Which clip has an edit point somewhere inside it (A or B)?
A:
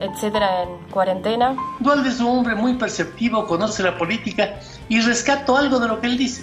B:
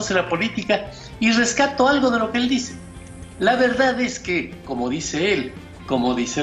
A